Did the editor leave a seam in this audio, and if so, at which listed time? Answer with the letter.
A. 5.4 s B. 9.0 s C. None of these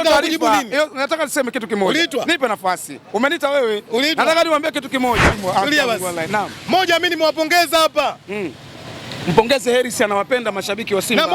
A